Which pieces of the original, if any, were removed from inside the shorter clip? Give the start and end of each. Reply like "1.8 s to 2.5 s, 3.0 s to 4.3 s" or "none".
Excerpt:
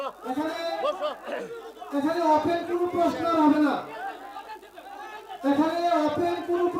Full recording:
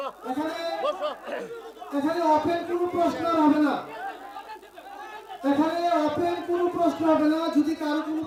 none

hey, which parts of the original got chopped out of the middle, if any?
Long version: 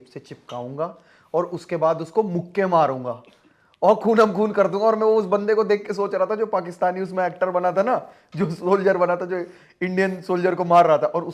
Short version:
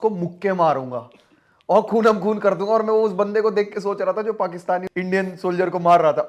7.0 s to 9.7 s

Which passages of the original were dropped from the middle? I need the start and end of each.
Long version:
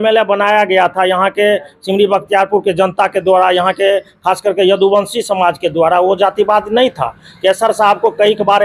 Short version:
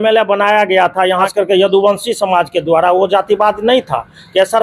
1.3 s to 4.4 s

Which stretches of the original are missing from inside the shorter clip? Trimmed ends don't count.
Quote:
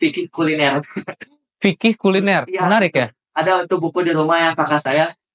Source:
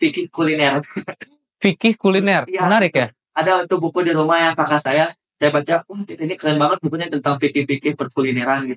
none

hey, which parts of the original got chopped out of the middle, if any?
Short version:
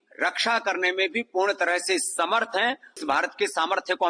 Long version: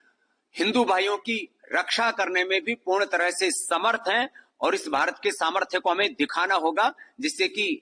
4.5 s to 4.8 s

